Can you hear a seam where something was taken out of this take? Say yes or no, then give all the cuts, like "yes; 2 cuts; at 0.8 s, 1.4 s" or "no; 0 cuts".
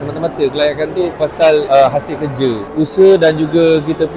yes; 1 cut; at 2.6 s